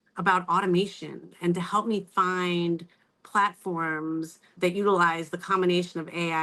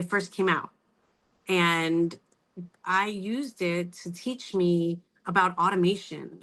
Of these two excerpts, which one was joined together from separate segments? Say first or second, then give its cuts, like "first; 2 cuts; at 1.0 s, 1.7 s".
first; 1 cut; at 4.5 s